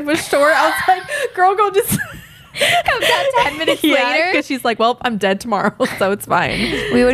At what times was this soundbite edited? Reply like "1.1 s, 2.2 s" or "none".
none